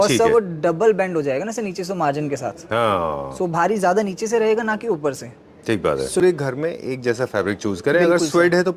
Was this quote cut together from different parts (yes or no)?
yes